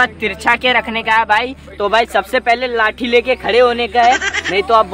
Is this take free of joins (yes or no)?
no